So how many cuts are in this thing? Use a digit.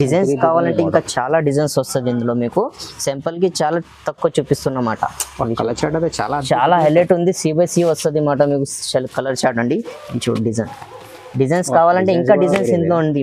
0